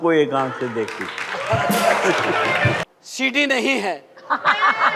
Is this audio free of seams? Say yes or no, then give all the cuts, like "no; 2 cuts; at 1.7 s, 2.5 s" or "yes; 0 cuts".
no; 1 cut; at 2.8 s